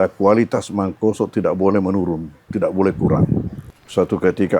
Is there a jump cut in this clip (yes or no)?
yes